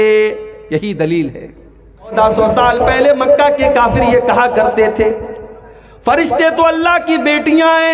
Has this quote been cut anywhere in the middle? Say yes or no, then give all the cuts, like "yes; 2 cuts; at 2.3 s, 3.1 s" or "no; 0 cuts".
yes; 1 cut; at 2.1 s